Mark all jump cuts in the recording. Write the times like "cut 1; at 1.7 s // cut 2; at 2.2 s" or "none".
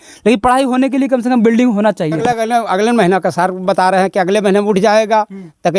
cut 1; at 2.2 s